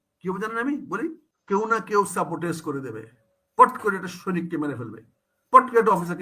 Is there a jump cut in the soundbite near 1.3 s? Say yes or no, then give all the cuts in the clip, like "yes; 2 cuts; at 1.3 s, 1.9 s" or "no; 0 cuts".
yes; 1 cut; at 1.3 s